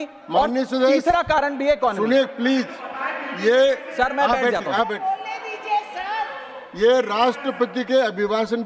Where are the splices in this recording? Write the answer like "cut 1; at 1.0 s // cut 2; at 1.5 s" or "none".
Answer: none